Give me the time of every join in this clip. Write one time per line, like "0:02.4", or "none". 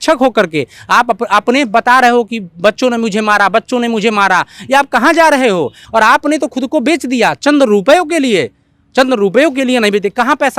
0:05.8

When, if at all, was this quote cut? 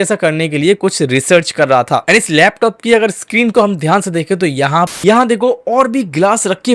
0:04.9

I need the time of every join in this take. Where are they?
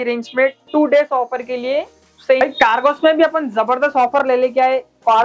0:02.4

